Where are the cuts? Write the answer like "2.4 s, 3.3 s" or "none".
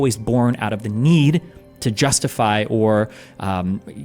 none